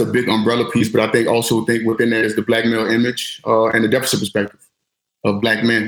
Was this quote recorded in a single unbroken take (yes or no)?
yes